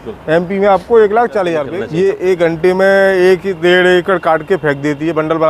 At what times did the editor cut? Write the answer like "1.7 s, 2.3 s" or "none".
1.8 s